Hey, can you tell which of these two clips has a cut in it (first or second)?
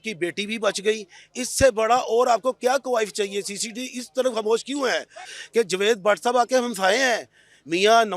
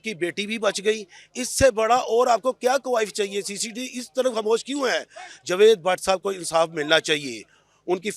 first